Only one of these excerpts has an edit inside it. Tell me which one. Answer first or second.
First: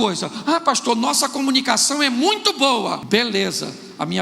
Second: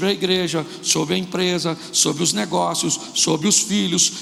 first